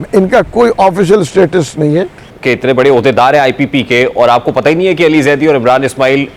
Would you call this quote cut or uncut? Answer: cut